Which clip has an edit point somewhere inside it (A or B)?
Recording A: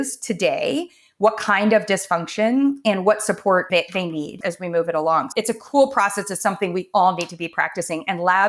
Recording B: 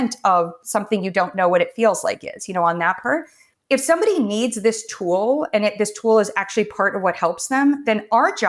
A